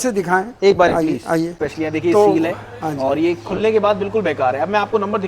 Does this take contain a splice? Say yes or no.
yes